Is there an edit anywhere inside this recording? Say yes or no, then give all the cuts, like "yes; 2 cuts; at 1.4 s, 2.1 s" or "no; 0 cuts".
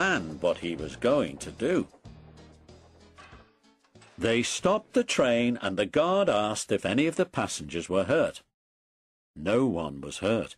yes; 1 cut; at 1.7 s